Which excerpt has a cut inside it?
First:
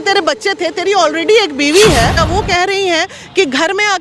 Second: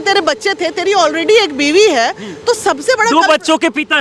first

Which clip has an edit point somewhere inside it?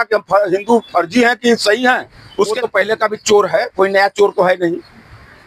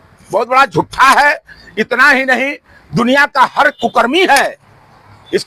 first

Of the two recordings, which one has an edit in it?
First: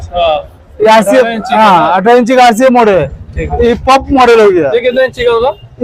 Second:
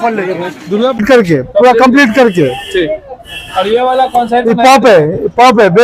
second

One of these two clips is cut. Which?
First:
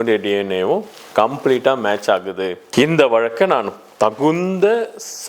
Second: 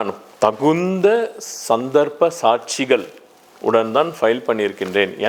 first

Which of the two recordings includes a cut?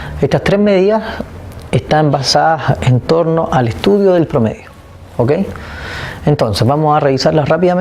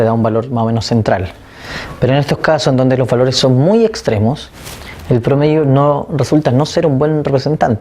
second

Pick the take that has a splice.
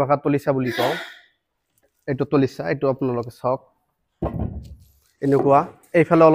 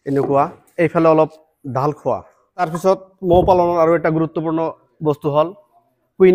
second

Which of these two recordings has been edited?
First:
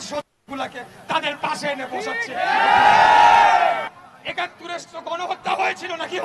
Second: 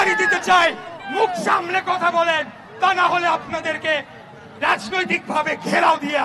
first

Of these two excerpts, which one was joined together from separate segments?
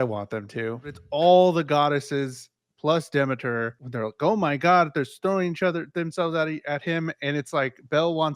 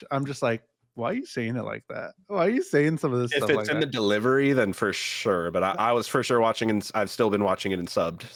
first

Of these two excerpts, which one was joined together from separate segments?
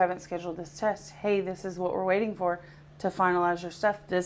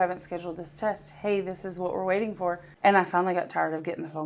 second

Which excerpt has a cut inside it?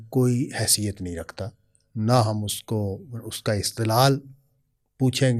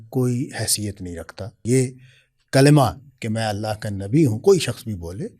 second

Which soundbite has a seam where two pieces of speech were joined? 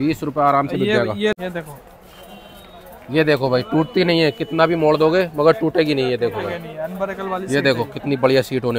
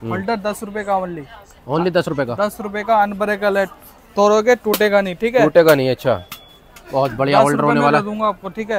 first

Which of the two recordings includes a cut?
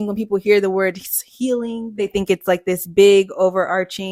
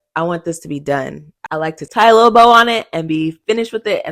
second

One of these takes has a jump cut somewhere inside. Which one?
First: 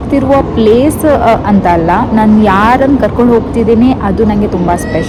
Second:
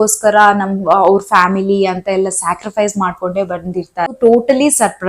second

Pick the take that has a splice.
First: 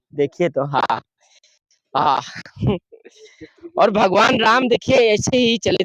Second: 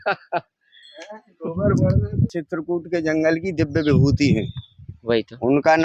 second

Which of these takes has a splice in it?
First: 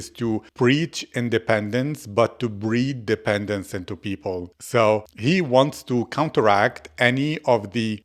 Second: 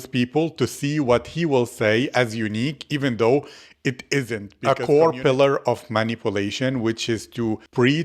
second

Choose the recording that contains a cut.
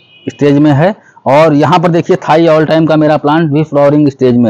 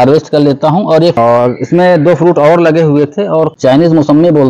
second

